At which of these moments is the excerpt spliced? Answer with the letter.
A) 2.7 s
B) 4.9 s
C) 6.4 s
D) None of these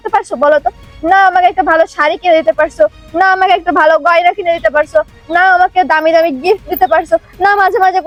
D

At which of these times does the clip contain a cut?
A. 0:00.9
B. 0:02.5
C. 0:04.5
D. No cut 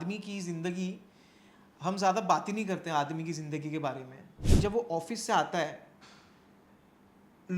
C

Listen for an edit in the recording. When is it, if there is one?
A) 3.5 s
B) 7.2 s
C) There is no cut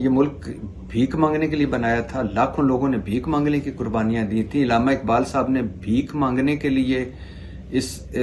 C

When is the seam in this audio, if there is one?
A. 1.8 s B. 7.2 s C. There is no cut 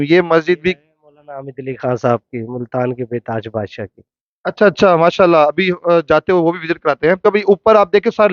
B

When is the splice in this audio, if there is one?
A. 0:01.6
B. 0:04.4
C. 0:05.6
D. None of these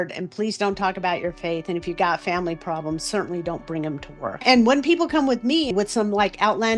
B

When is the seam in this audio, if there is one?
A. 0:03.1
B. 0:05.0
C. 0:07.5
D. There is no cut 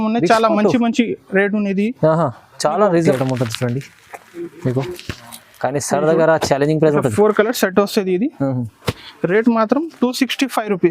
A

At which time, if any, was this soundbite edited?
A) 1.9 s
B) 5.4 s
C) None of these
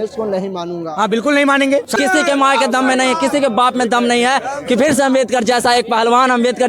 A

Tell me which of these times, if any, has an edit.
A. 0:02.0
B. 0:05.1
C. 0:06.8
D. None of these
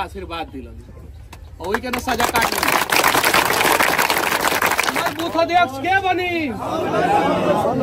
B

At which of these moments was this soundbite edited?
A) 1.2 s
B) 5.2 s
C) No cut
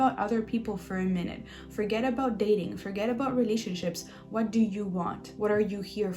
B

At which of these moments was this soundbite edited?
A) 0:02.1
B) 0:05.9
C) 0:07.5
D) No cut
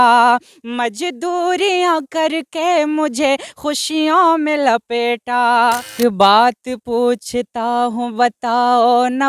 B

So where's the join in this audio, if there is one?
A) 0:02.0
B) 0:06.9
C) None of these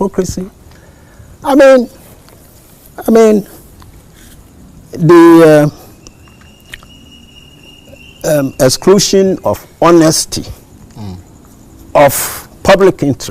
B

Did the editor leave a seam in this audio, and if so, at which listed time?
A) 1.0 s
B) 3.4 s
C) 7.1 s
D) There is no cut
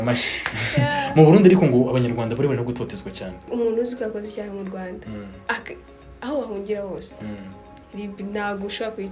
B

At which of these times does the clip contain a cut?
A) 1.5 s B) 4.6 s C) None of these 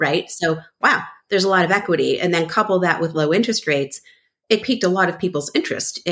B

